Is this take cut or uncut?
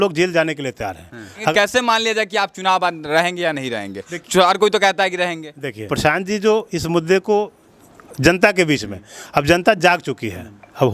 cut